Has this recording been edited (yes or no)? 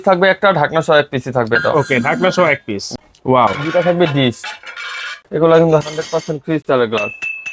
yes